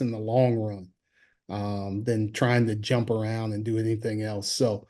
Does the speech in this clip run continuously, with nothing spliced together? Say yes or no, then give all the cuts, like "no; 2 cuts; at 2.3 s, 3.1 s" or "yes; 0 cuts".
yes; 0 cuts